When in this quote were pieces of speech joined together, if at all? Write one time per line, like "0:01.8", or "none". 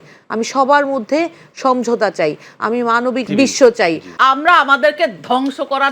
0:03.3
0:04.1

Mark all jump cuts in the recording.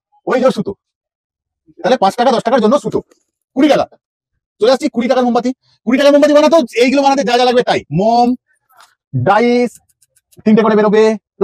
none

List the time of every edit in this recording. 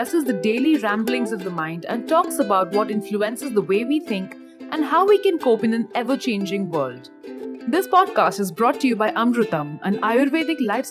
none

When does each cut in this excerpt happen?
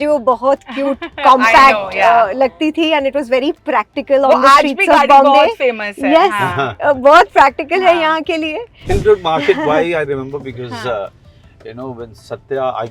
0:08.9

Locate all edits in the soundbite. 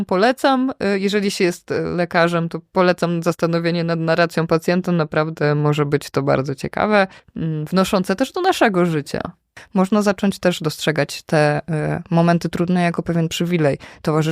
0:07.3
0:09.6

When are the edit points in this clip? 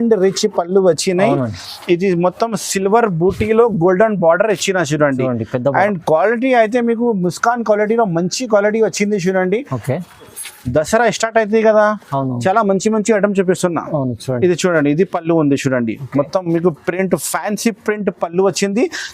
0:10.4

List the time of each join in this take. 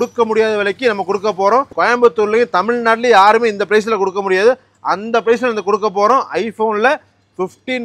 0:01.7

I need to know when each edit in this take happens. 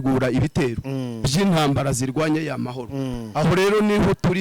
none

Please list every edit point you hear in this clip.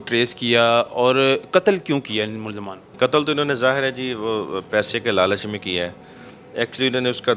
0:02.9

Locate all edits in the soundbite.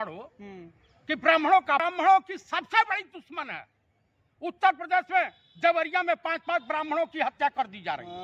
0:01.8

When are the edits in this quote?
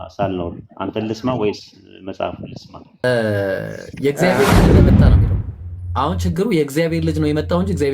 0:03.0

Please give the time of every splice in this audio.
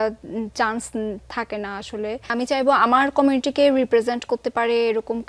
0:02.3

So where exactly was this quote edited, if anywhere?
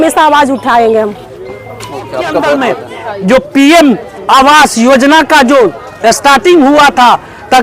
0:02.7

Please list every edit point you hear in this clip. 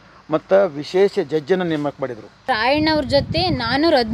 0:02.5

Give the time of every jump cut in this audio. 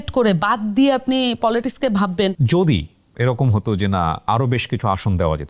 0:02.4

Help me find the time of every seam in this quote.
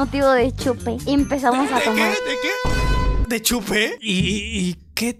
none

